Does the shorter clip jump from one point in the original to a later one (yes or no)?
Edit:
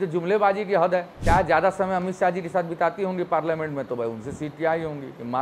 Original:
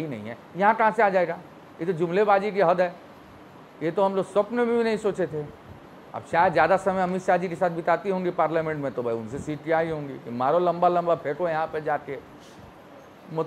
yes